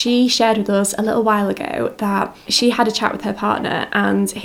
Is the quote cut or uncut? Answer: cut